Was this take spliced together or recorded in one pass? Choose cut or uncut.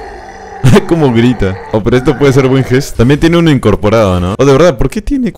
cut